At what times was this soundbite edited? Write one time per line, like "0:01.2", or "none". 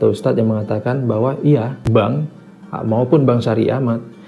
0:02.3